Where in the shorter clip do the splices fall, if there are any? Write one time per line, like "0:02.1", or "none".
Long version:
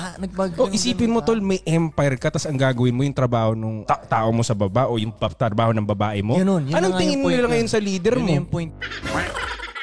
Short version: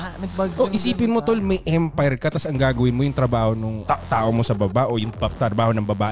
none